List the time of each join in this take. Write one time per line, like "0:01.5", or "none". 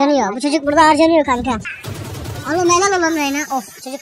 0:01.6

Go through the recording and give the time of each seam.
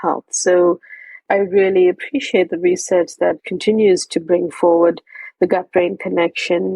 0:01.2
0:03.5

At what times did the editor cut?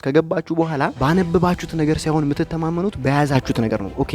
0:00.9

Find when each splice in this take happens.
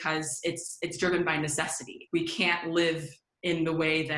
0:02.0

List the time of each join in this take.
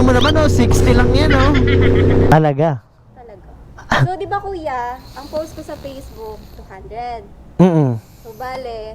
0:02.3

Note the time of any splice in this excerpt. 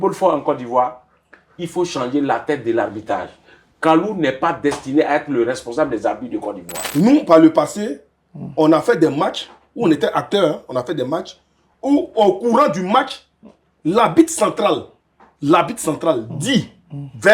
0:06.7

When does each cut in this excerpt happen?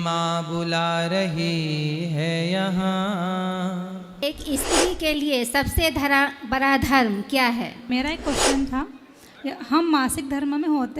0:04.1
0:07.9

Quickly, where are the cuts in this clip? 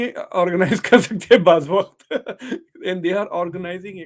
none

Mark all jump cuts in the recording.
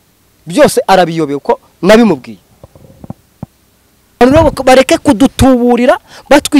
0:04.2

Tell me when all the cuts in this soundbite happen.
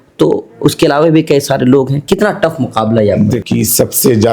0:03.4

